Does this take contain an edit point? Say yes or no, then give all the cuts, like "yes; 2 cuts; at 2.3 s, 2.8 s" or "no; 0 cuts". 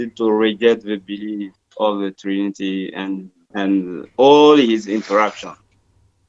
no; 0 cuts